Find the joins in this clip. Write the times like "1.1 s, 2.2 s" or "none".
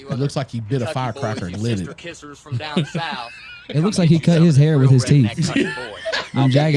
none